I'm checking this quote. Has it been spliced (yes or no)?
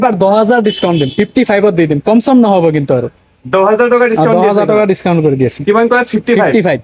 no